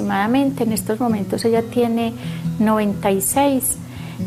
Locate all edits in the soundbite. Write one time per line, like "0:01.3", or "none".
none